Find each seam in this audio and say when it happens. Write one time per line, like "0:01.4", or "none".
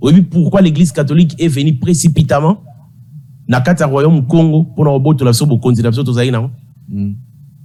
none